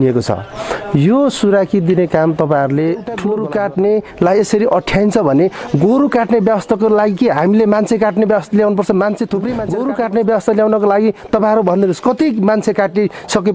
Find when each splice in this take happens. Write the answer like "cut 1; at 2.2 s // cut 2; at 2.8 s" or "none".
cut 1; at 3.2 s // cut 2; at 9.6 s